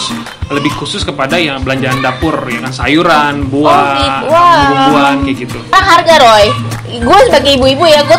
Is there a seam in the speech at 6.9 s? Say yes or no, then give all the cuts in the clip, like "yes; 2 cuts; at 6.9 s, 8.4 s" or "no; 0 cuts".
no; 1 cut; at 5.7 s